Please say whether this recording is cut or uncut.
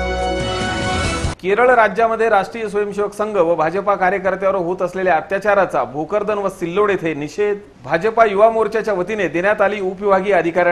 uncut